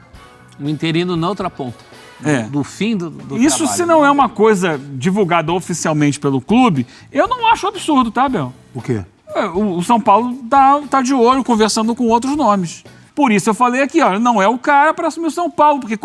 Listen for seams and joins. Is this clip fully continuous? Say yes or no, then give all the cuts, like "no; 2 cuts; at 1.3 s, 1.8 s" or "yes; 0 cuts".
no; 1 cut; at 13.0 s